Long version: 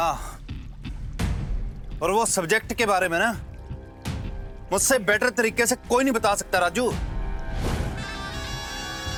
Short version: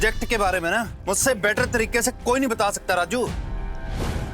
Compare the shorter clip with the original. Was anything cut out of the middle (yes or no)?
yes